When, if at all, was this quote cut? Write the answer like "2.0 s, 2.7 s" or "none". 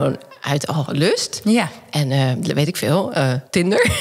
none